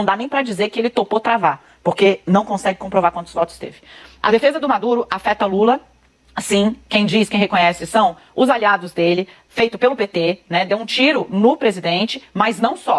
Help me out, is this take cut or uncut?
uncut